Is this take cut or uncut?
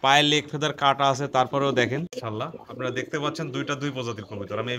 cut